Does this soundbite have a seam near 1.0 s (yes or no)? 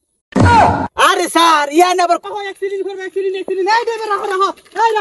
no